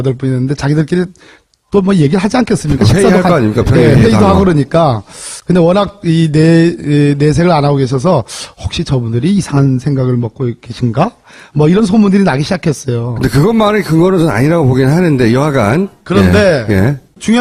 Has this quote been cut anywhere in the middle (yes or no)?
no